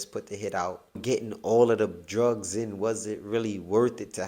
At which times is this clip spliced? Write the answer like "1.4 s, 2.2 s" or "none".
1.0 s